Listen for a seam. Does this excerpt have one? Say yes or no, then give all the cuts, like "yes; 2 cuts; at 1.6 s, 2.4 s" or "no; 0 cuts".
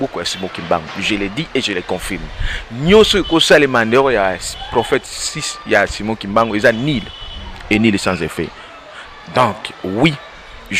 no; 0 cuts